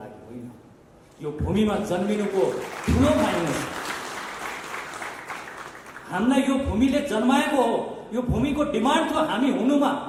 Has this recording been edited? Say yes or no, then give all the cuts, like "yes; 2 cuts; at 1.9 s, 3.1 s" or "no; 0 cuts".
no; 0 cuts